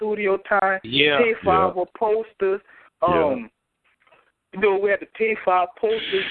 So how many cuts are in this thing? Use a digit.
0